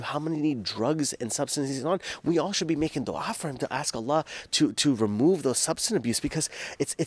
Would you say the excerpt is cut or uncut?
uncut